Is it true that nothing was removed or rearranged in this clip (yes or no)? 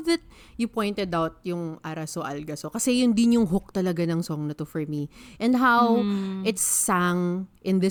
yes